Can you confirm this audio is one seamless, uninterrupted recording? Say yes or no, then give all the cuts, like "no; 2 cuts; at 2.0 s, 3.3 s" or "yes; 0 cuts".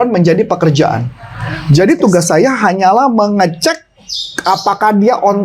yes; 0 cuts